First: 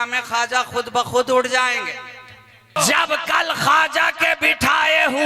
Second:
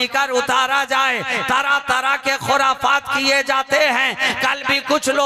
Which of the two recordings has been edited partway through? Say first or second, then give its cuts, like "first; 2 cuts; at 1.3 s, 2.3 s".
first; 1 cut; at 2.8 s